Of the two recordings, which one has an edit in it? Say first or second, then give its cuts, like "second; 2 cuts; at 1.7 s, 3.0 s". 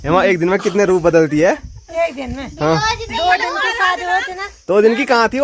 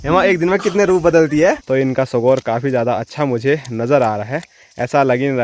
second; 1 cut; at 1.6 s